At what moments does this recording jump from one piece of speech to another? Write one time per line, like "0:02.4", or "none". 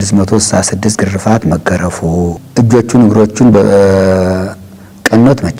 0:02.4